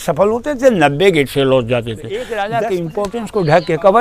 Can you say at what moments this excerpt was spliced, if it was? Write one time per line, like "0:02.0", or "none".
0:02.3